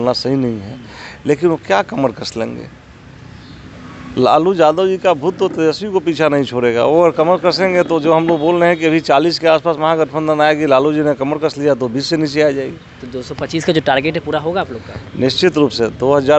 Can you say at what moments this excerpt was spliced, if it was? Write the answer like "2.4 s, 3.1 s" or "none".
none